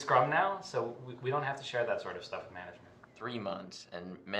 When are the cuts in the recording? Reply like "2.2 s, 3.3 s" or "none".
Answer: 1.1 s